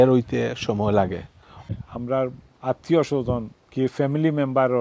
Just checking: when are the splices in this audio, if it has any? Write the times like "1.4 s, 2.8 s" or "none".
1.7 s

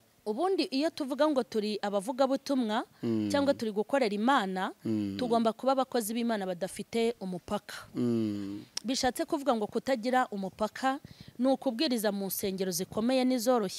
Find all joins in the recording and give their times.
none

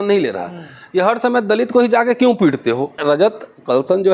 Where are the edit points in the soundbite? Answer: 3.0 s

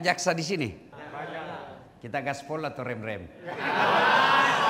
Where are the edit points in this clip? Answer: 0.9 s

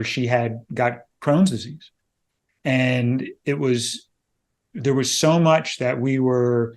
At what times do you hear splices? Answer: none

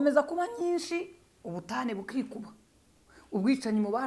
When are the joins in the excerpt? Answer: none

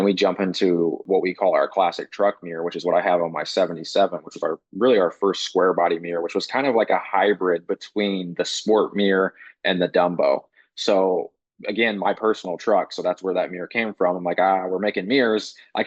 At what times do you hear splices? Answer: 1.0 s

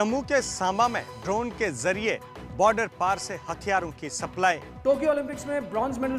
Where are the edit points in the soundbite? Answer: 4.7 s

